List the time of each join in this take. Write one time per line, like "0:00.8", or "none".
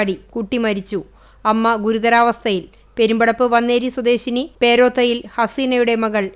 none